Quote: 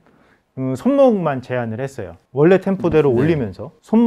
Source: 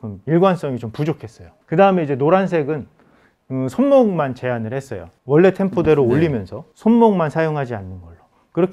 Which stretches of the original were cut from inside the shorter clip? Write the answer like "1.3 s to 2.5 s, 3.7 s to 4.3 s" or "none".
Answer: none